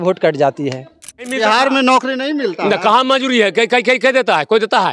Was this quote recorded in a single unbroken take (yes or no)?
no